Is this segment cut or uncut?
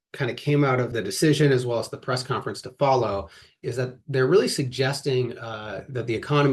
cut